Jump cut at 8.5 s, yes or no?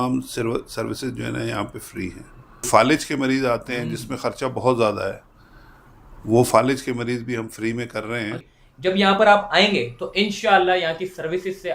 yes